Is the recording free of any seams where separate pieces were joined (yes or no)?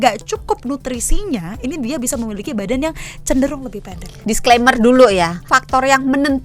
no